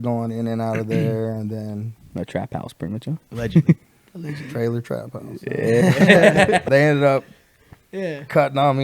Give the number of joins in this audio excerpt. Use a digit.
1